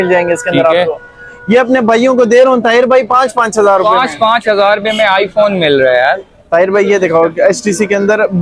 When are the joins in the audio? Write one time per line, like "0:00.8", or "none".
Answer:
none